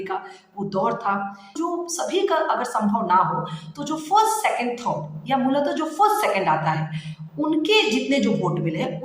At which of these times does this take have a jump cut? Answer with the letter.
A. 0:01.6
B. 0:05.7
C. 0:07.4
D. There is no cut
A